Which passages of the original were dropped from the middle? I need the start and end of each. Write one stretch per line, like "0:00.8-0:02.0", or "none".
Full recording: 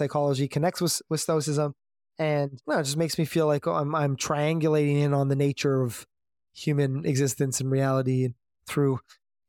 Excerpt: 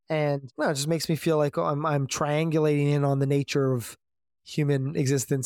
none